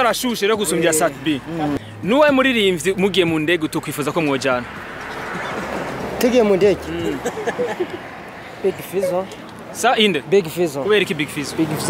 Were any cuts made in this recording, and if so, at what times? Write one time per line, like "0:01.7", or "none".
0:01.7